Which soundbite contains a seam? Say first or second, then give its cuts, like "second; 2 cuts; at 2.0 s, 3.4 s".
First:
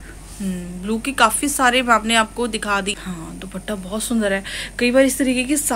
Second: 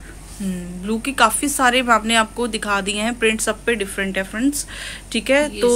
first; 1 cut; at 2.9 s